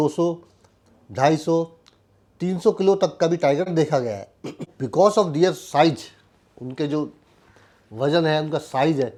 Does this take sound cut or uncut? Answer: uncut